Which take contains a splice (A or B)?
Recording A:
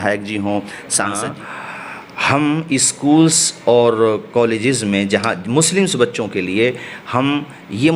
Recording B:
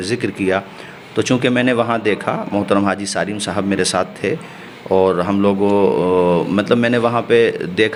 A